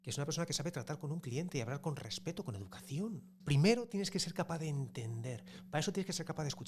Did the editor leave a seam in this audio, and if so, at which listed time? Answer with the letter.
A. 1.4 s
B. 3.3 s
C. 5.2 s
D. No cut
B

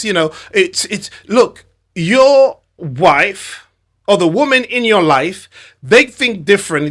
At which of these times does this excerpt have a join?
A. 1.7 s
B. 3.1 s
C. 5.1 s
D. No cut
D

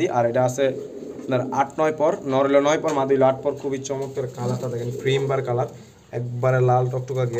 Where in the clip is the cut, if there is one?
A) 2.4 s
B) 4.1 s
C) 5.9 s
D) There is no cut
D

